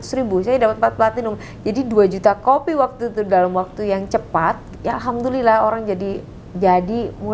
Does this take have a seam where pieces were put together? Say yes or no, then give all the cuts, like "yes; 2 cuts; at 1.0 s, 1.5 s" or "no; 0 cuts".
yes; 1 cut; at 4.7 s